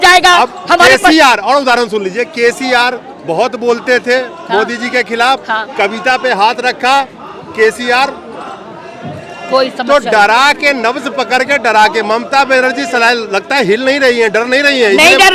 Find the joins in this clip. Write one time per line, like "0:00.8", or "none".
none